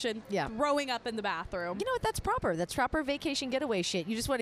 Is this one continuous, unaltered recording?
yes; 0 cuts

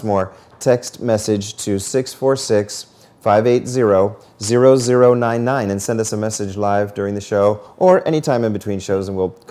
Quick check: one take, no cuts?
yes; 0 cuts

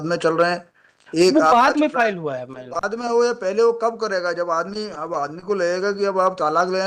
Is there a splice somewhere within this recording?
no; 0 cuts

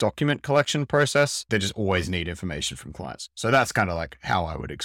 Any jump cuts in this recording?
yes; 1 cut; at 1.5 s

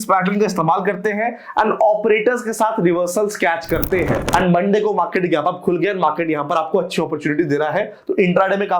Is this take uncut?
no; 1 cut; at 4.2 s

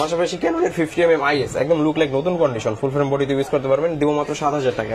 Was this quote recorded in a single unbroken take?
yes; 0 cuts

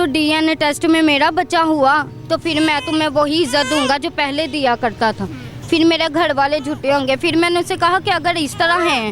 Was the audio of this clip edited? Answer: no; 0 cuts

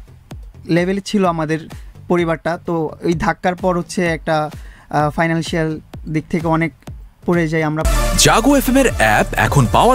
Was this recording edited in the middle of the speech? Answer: yes; 1 cut; at 7.9 s

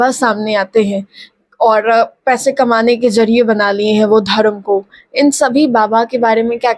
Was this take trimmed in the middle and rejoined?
no; 0 cuts

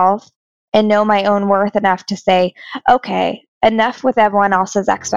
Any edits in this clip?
no; 0 cuts

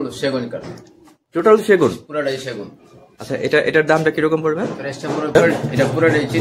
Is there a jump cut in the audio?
yes; 1 cut; at 5.3 s

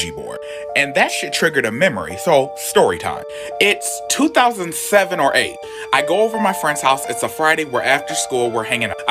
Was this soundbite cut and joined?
no; 0 cuts

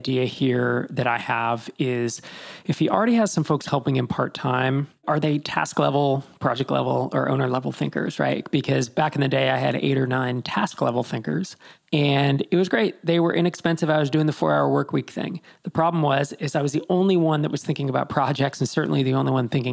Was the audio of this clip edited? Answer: no; 0 cuts

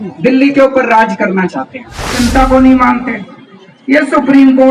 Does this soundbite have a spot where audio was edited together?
yes; 1 cut; at 2.2 s

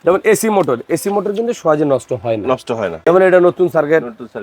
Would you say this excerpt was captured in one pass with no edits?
no; 1 cut; at 3.0 s

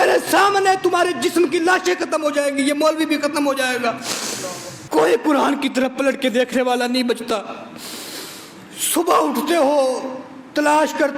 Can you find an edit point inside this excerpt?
yes; 1 cut; at 4.7 s

